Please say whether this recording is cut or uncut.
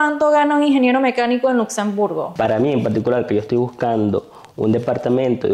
cut